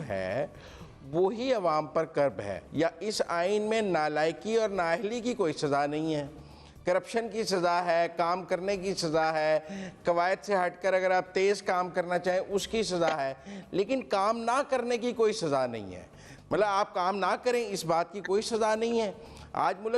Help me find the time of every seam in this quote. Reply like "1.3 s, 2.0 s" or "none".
2.5 s